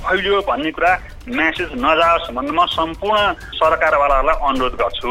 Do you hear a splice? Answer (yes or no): yes